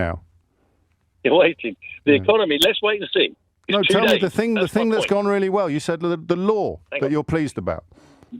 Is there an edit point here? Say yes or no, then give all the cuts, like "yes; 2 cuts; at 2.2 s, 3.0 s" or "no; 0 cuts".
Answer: no; 0 cuts